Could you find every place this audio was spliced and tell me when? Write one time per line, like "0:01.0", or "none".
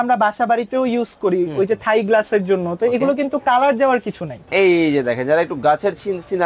0:04.4